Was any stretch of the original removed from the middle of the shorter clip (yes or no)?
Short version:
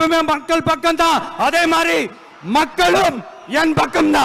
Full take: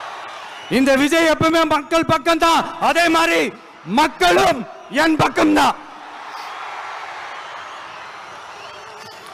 no